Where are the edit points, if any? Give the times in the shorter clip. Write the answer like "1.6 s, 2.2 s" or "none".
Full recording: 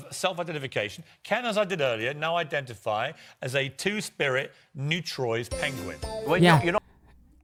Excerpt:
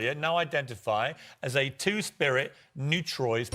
none

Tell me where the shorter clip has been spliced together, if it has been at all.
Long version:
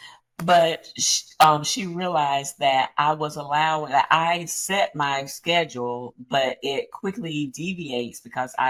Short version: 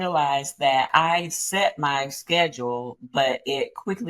0.9 s

